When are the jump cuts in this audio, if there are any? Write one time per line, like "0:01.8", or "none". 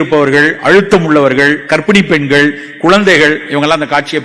none